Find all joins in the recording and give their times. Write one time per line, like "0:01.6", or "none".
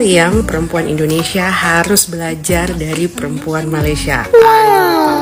none